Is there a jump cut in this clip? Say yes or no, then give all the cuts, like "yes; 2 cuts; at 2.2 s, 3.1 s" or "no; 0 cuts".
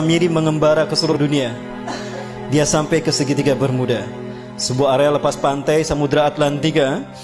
yes; 1 cut; at 1.1 s